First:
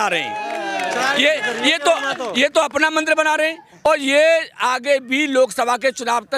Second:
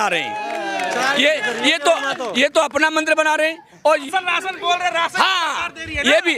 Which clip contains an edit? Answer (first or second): second